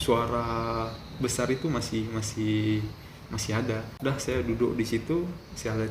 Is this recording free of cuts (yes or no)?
no